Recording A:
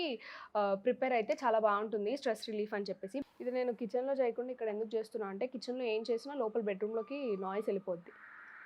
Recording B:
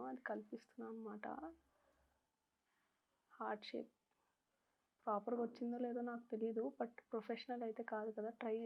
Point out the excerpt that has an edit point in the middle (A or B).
A